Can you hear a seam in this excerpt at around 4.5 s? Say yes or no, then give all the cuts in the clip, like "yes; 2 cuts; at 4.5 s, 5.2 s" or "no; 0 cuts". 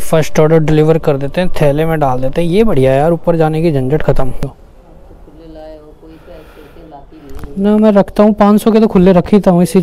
yes; 1 cut; at 4.5 s